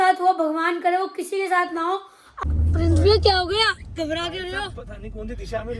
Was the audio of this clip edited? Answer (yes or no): yes